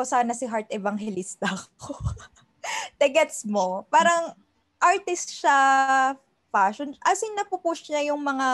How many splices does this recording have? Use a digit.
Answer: 0